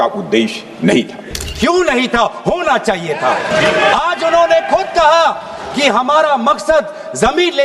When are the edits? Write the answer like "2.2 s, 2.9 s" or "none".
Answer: 1.4 s, 3.5 s